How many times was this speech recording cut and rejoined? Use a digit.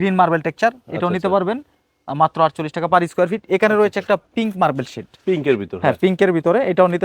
0